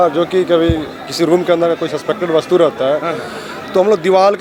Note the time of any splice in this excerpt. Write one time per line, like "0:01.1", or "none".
none